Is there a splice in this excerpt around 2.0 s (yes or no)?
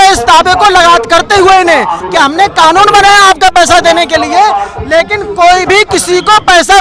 yes